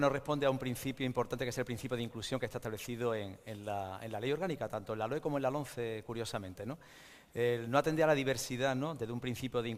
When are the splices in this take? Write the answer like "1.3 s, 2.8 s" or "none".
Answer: none